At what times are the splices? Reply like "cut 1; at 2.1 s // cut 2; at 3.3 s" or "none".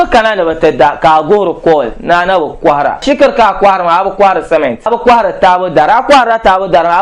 cut 1; at 3.0 s // cut 2; at 4.9 s